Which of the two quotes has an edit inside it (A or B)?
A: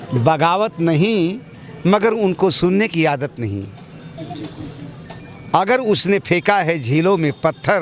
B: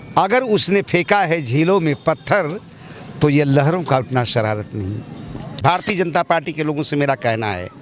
B